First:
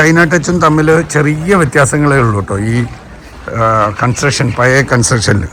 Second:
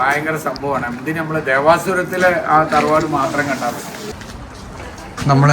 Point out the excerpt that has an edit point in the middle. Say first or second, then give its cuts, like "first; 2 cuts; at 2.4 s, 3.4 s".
second; 1 cut; at 4.0 s